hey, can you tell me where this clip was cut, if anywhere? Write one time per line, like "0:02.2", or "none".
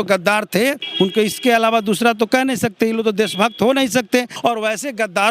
0:00.8
0:04.3